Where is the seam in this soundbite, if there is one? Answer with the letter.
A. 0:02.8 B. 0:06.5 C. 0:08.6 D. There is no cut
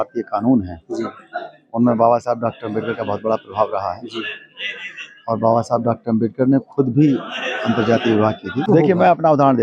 C